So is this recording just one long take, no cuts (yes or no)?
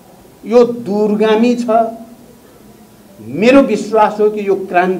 yes